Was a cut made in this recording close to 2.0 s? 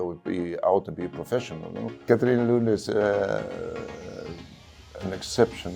yes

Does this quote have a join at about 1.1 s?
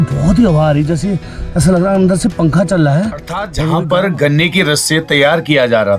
no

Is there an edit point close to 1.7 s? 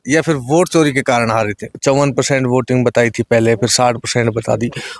yes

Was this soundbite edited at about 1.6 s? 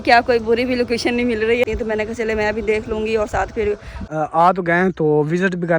yes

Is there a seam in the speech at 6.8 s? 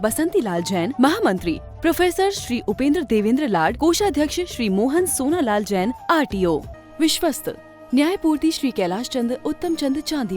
yes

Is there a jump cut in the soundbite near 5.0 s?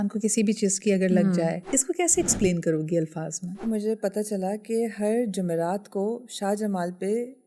no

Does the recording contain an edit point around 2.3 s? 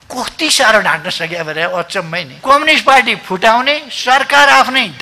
yes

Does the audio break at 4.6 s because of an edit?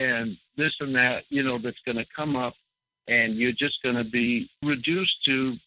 yes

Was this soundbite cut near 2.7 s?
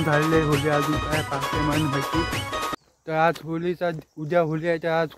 yes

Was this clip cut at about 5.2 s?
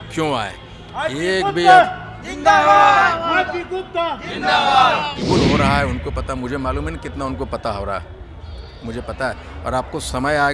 yes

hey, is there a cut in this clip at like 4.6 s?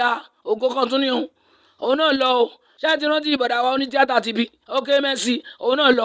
yes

